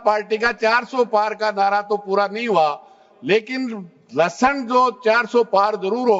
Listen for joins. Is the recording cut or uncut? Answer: uncut